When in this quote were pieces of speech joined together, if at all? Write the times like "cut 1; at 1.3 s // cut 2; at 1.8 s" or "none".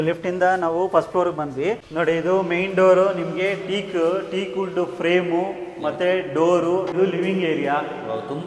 cut 1; at 1.8 s // cut 2; at 6.9 s